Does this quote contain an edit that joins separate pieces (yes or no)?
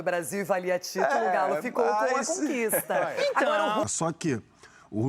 yes